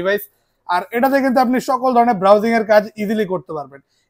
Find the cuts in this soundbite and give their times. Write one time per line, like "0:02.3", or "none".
none